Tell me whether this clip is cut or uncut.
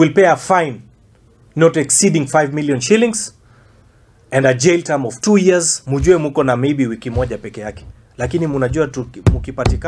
cut